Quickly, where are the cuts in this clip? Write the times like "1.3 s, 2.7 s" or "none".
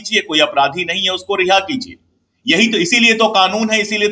none